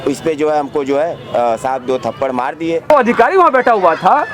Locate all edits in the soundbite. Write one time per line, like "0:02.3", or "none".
0:02.9